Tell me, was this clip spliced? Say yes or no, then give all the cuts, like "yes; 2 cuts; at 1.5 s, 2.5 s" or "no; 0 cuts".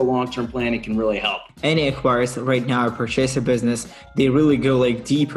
yes; 1 cut; at 1.5 s